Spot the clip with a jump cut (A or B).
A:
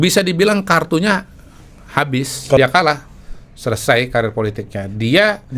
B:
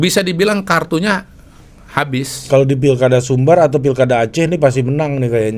A